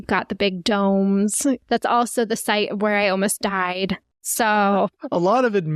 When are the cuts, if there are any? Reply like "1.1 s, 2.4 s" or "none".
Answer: 1.6 s